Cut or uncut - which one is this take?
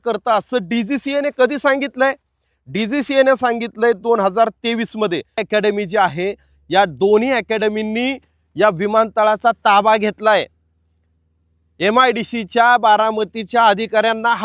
cut